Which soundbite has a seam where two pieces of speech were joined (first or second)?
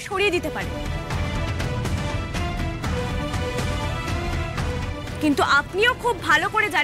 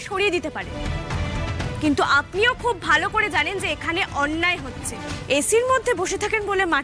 second